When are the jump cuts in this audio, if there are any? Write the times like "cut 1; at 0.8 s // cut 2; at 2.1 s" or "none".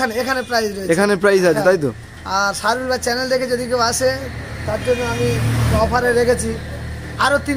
cut 1; at 5.8 s